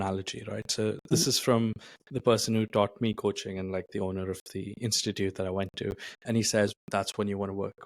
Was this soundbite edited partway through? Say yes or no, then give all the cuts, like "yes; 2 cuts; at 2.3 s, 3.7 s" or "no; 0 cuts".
yes; 2 cuts; at 1.1 s, 6.8 s